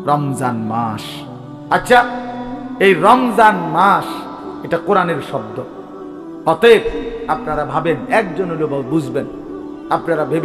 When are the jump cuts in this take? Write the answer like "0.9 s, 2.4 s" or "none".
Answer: none